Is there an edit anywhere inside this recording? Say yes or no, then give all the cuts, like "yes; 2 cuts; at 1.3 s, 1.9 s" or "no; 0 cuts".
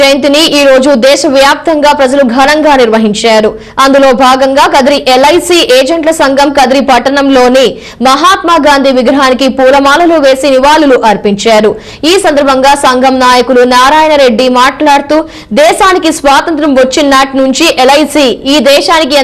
no; 0 cuts